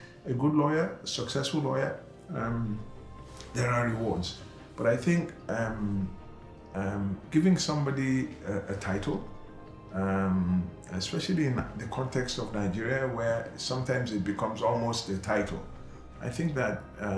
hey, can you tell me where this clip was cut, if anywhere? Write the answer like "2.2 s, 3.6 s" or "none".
none